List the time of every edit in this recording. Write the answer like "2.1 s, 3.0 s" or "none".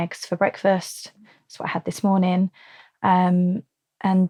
none